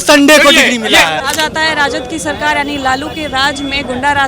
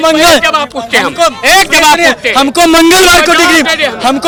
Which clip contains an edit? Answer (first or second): first